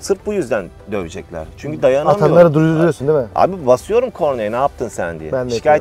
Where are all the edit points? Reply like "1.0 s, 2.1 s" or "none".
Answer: none